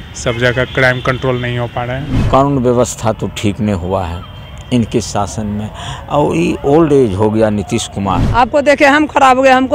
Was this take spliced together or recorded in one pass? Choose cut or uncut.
cut